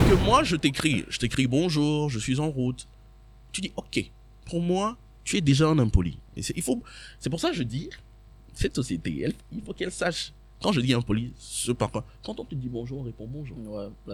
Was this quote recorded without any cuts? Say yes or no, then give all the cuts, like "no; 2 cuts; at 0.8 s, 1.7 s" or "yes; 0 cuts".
yes; 0 cuts